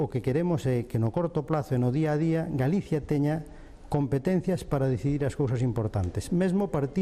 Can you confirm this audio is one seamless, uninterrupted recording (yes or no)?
yes